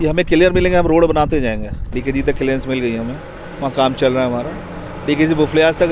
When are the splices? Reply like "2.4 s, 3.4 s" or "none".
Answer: 1.9 s